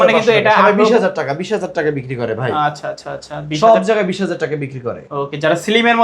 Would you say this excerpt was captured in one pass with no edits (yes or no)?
yes